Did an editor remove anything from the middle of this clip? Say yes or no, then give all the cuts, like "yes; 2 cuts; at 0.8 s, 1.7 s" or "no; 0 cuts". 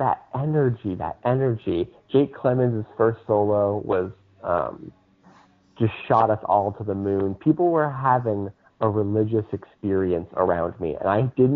no; 0 cuts